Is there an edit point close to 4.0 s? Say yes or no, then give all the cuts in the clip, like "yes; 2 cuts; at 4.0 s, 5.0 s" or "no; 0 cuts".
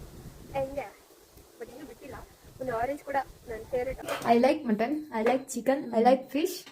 yes; 1 cut; at 4.0 s